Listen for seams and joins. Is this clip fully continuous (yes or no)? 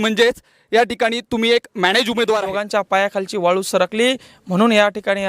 no